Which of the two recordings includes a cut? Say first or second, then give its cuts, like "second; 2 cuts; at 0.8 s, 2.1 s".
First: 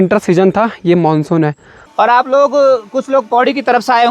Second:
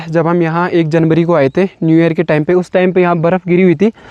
first; 1 cut; at 1.8 s